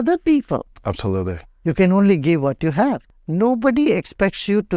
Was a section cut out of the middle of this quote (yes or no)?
yes